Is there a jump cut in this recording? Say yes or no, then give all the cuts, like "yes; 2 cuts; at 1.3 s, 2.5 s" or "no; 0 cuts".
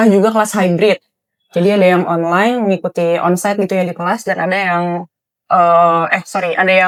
no; 0 cuts